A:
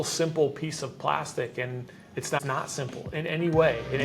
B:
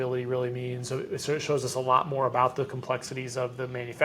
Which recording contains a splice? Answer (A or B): A